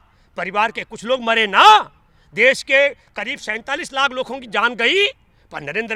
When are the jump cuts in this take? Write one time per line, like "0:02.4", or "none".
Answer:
none

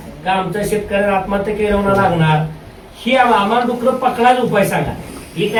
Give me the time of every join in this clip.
none

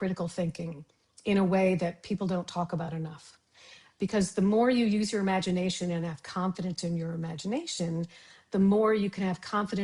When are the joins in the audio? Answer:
none

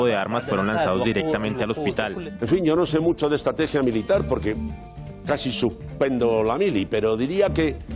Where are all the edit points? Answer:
0:02.3

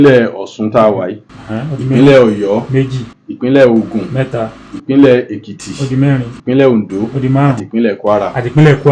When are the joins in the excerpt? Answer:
none

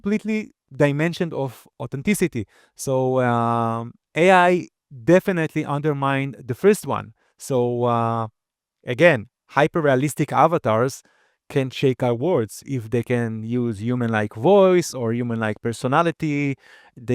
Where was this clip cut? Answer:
none

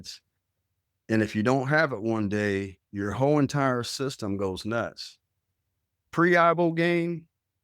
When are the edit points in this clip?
0:05.9

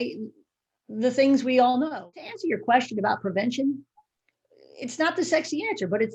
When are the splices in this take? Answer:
0:02.2

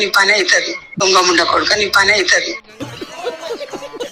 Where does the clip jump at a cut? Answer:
none

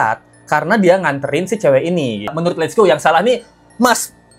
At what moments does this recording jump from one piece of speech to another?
0:02.4

